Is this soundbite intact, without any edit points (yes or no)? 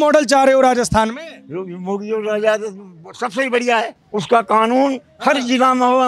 no